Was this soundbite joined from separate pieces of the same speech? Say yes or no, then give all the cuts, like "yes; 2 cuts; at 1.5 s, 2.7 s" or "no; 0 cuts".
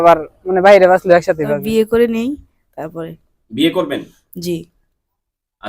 yes; 1 cut; at 1.5 s